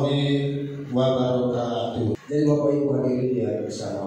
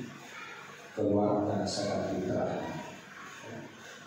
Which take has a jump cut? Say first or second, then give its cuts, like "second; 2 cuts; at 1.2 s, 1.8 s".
first; 1 cut; at 2.1 s